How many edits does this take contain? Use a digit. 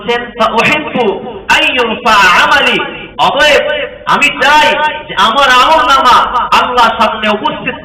0